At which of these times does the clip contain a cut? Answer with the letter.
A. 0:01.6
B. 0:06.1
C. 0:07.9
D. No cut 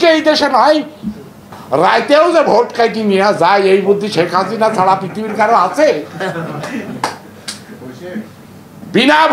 A